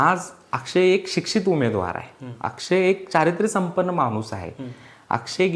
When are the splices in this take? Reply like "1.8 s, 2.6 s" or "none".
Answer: none